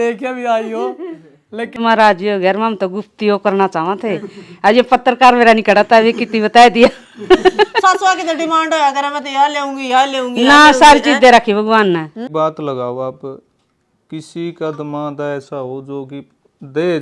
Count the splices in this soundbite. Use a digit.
2